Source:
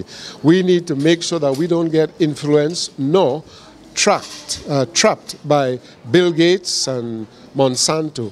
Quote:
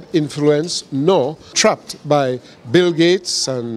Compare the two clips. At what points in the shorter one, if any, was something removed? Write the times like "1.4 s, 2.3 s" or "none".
1.5 s